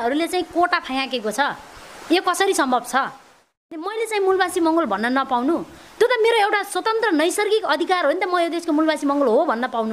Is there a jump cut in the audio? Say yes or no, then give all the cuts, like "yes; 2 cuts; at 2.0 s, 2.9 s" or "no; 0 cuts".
yes; 1 cut; at 3.9 s